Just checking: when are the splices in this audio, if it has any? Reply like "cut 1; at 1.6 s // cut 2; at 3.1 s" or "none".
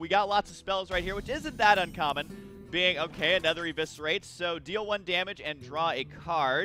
none